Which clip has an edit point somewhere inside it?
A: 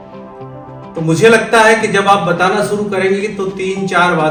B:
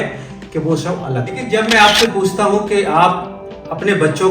B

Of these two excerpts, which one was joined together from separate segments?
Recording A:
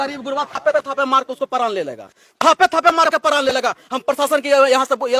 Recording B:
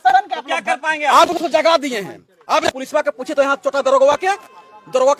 B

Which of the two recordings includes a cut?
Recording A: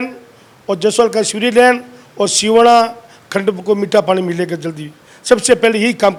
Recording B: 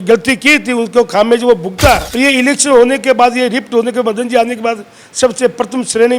B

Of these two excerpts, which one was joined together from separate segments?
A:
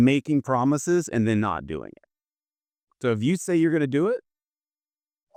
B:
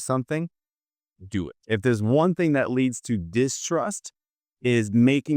B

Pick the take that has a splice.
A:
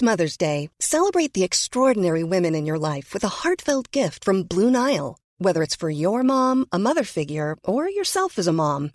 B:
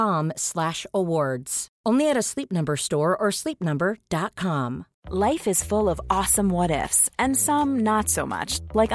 B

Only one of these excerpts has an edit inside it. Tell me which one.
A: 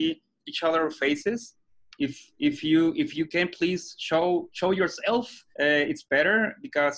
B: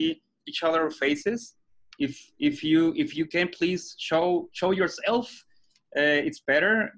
A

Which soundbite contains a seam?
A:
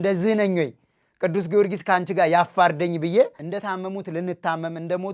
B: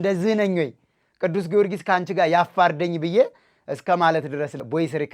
A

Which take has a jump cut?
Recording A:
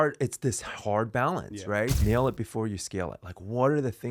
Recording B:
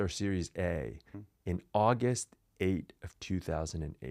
A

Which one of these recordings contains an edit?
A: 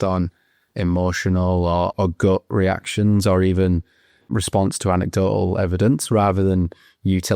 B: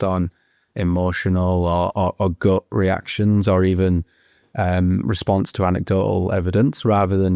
A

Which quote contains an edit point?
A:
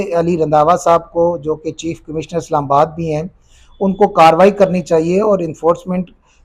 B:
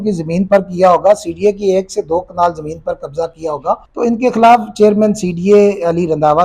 B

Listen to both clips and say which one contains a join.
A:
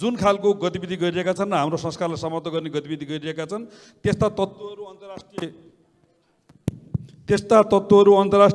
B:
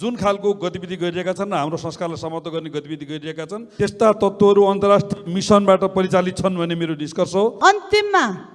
B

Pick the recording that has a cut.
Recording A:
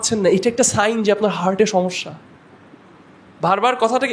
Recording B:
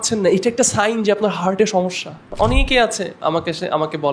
B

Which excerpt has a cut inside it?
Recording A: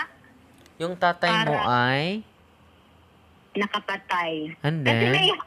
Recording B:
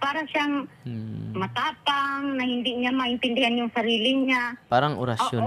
B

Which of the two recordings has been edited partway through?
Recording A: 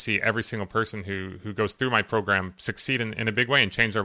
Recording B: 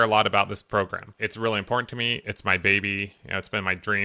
B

